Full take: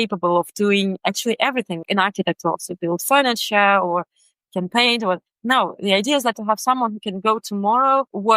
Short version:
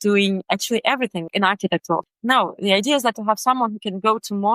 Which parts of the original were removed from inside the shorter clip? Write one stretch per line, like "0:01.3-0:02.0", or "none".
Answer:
0:02.7-0:05.3